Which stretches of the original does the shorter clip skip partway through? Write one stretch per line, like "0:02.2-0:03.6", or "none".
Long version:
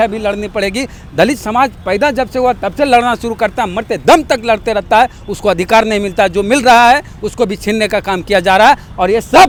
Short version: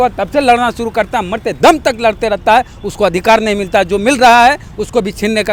none